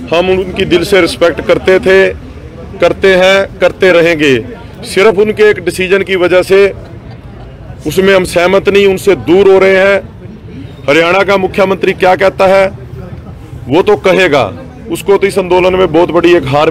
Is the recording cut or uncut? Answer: uncut